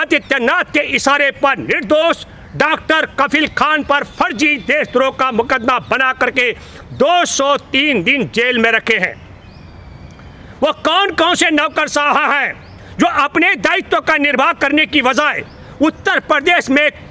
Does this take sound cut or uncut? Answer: uncut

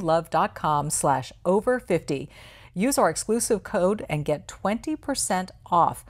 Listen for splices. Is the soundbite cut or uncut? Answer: uncut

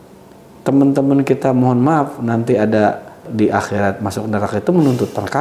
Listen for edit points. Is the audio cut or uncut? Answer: cut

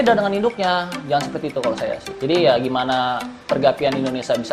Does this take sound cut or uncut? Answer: cut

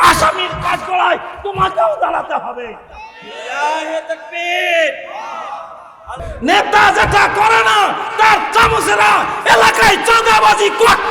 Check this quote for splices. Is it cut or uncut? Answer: cut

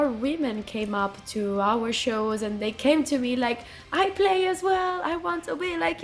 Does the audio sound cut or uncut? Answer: uncut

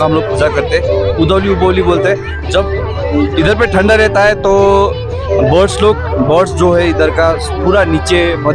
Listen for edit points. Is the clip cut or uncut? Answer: uncut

